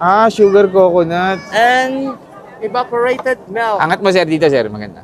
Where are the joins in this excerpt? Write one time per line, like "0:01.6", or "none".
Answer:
none